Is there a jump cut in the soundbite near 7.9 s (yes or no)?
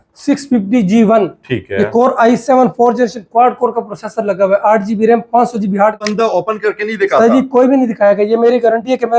no